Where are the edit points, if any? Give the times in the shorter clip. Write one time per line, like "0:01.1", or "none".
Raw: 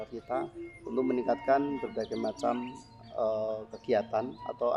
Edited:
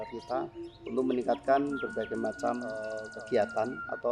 0:02.9